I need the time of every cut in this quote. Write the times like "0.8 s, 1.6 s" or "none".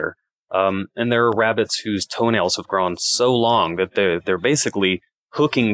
none